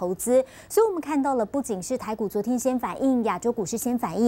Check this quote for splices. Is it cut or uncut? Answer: uncut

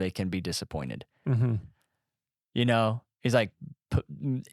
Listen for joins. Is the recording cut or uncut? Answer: uncut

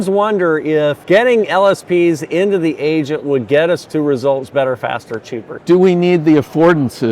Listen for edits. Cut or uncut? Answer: cut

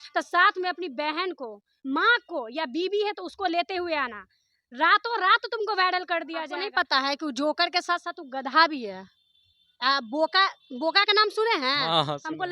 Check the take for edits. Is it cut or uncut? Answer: cut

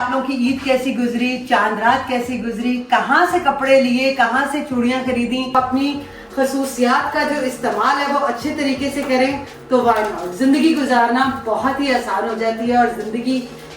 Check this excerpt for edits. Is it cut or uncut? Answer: cut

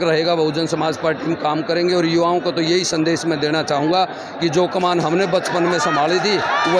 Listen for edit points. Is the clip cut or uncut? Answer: uncut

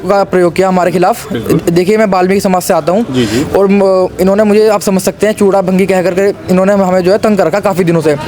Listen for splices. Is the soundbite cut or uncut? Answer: uncut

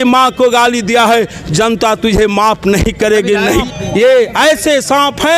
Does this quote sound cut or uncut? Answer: cut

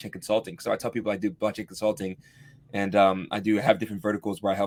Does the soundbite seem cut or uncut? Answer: uncut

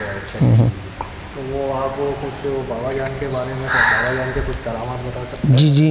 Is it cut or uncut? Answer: uncut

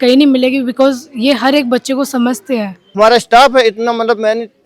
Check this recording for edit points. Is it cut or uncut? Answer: cut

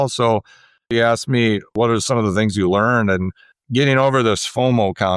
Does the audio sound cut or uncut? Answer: cut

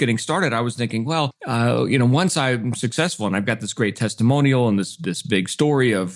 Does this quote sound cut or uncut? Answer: uncut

